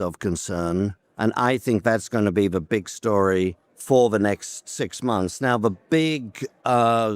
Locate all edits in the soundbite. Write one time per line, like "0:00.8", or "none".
0:01.0
0:03.7

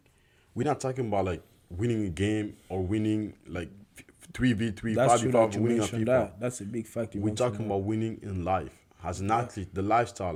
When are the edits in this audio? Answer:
none

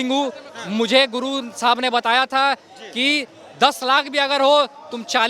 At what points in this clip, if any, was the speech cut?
none

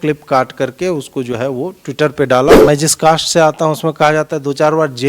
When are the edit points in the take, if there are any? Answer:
0:02.5

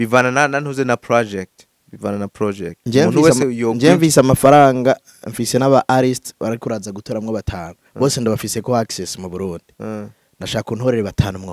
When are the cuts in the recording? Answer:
none

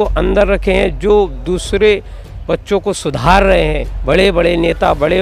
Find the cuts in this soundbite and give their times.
0:03.9

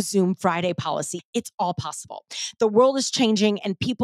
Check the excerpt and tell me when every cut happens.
0:01.1

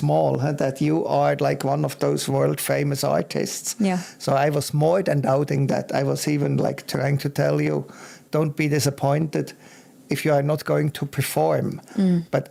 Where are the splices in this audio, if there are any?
none

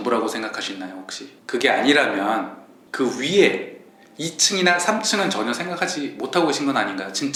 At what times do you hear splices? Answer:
none

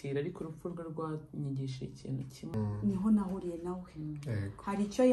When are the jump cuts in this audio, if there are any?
0:02.5

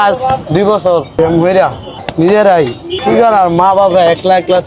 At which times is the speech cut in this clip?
0:01.1
0:01.9

